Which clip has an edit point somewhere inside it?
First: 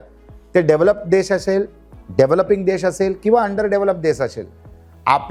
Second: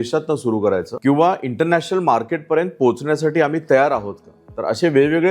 second; 1 cut; at 0.9 s

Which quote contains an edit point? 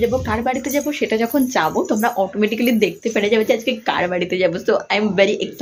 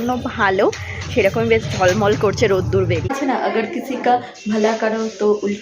second; 1 cut; at 3.1 s

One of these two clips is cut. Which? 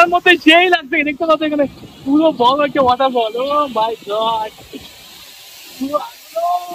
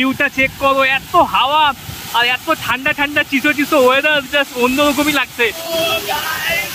second; 1 cut; at 5.6 s

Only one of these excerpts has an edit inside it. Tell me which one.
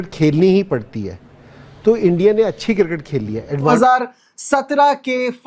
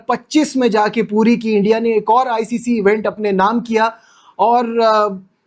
first; 1 cut; at 3.7 s

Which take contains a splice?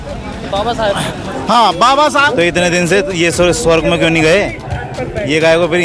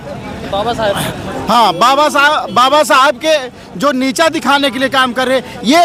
first; 1 cut; at 2.3 s

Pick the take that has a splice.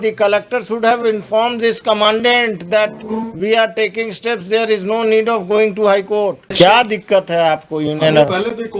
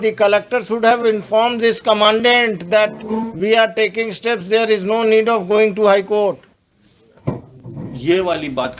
first; 1 cut; at 6.5 s

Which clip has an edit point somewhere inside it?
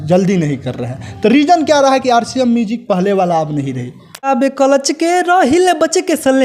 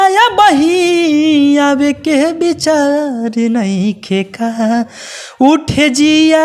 first; 1 cut; at 4.3 s

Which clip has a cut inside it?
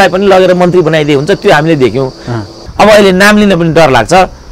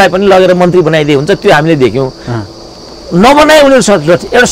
first; 1 cut; at 2.6 s

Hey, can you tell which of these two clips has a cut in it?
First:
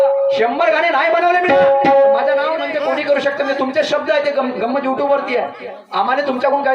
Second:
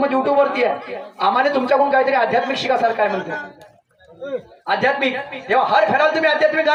first; 1 cut; at 2.7 s

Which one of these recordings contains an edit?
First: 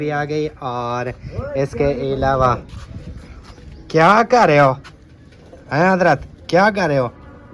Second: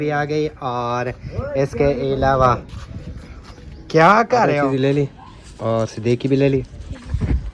second; 1 cut; at 4.6 s

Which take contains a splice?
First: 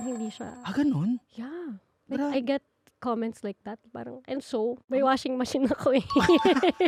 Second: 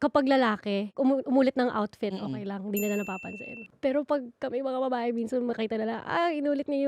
second; 2 cuts; at 1.0 s, 3.6 s

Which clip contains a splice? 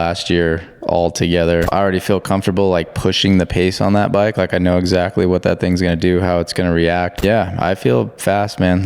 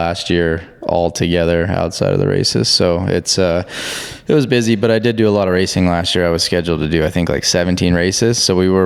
first; 2 cuts; at 1.7 s, 7.2 s

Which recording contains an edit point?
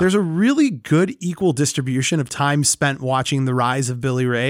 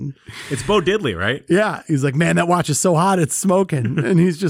second; 1 cut; at 1.8 s

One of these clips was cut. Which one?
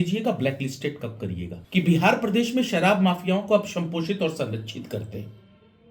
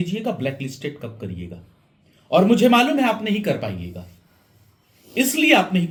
first; 1 cut; at 1.5 s

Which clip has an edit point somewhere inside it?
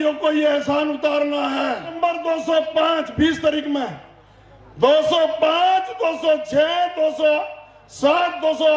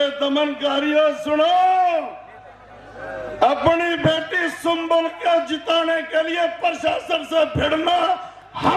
first; 1 cut; at 1.9 s

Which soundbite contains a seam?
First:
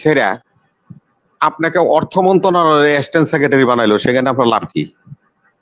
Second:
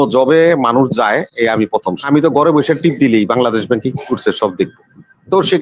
second; 1 cut; at 2.1 s

